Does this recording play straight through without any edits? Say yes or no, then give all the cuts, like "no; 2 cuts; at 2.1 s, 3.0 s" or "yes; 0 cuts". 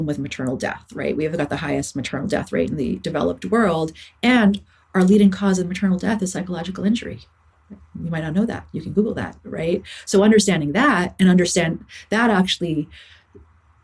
yes; 0 cuts